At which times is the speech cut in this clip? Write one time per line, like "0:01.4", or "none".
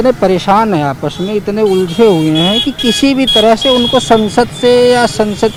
none

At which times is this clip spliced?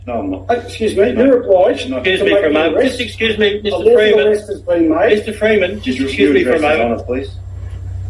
none

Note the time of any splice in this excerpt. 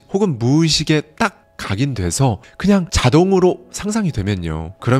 none

